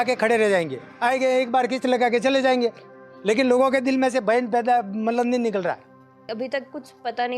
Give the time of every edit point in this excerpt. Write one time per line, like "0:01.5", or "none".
0:06.2